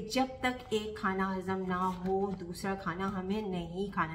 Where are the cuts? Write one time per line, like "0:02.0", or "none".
none